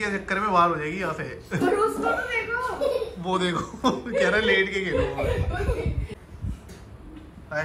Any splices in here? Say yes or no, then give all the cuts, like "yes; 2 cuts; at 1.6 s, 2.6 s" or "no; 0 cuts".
yes; 1 cut; at 6.1 s